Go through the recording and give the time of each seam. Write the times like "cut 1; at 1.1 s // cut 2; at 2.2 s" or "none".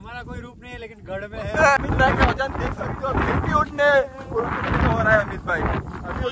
cut 1; at 1.8 s